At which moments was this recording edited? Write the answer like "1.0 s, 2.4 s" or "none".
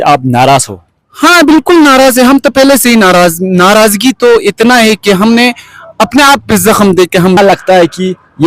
7.4 s